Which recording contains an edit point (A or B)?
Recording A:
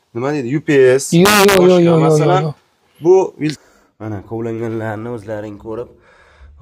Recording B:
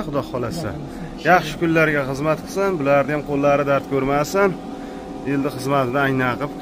A